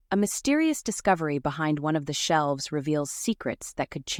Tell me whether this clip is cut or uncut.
uncut